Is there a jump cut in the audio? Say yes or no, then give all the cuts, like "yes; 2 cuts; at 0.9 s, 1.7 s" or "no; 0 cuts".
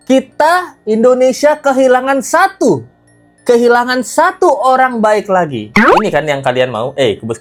no; 0 cuts